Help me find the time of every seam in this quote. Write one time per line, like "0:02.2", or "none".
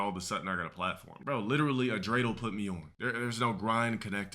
0:01.1
0:02.9